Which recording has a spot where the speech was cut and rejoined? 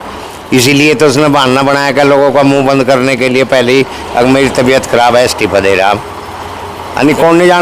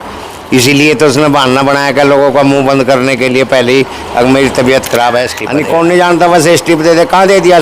second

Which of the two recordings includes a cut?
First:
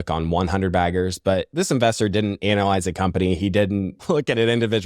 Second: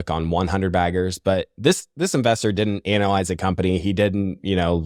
first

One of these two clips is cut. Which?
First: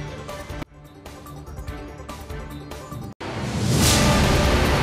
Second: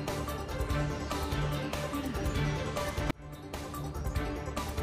first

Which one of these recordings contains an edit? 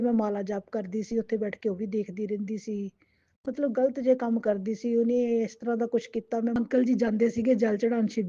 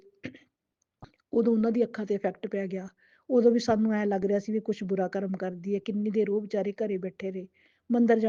first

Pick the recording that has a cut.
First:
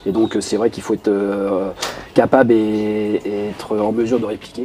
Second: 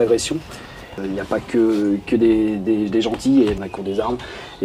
second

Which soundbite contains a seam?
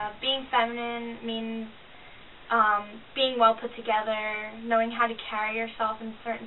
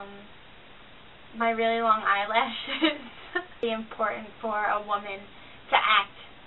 second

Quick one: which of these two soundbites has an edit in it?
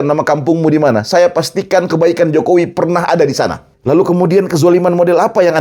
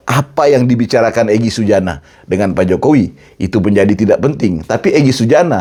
first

